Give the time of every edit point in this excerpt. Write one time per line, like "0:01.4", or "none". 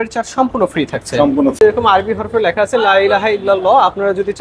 0:01.6